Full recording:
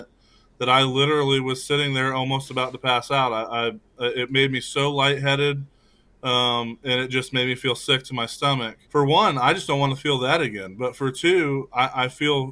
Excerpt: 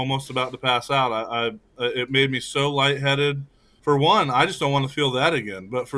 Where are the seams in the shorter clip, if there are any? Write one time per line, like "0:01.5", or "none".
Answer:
0:03.7